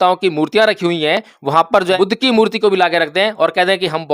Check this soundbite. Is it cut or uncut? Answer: cut